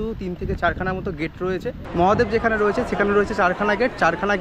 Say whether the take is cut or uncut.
cut